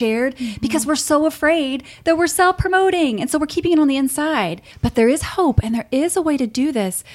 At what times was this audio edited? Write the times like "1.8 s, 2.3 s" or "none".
4.9 s